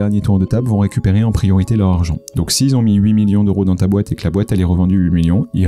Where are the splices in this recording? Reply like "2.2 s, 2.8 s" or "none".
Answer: none